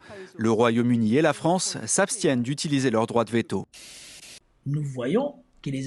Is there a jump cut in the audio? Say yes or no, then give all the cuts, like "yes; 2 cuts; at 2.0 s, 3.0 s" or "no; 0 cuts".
yes; 1 cut; at 4.2 s